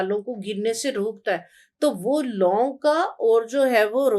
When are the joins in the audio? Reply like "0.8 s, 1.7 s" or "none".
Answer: none